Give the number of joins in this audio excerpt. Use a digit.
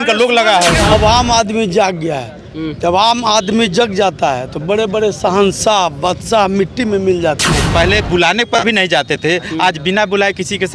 2